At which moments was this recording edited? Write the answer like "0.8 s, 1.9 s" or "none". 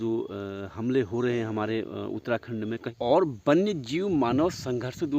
2.8 s